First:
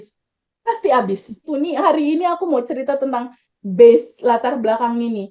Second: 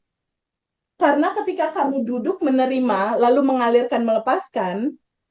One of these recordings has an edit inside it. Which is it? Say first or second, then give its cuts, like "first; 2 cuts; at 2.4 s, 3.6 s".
first; 1 cut; at 1.4 s